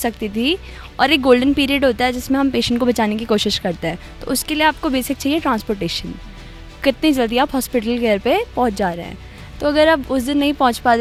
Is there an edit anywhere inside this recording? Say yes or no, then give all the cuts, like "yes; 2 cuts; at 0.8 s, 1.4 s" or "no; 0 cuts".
no; 0 cuts